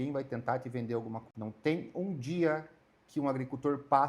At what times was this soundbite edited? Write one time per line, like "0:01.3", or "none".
0:01.3